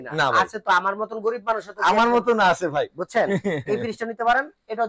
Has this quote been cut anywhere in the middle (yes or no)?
no